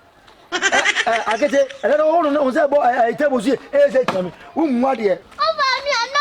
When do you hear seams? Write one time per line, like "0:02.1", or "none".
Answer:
0:05.3